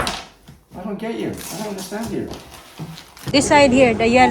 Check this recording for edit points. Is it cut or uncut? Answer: cut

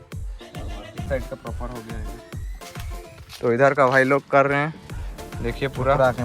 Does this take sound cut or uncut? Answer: cut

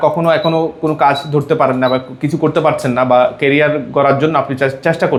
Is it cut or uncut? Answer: uncut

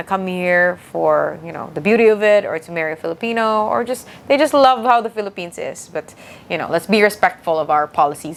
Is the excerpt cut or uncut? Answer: uncut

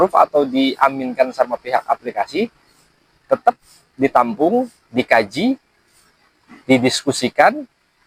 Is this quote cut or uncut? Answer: uncut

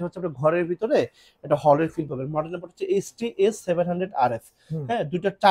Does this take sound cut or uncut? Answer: uncut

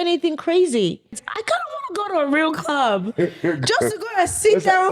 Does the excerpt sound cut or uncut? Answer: cut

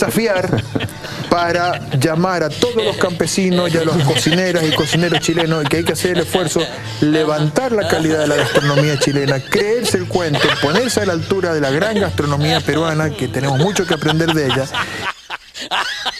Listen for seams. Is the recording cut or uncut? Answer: uncut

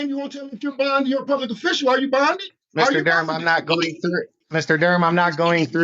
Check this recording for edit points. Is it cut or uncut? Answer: cut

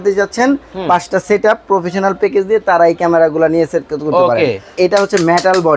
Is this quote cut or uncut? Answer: cut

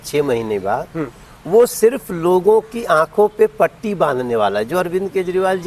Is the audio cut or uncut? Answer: uncut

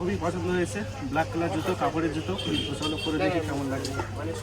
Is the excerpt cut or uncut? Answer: uncut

